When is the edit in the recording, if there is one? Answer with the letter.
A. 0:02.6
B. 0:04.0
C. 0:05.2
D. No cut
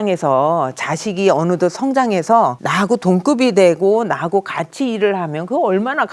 A